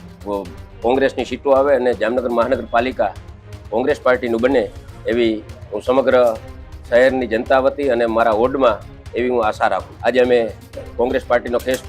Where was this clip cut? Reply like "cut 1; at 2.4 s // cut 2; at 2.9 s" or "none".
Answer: cut 1; at 9.9 s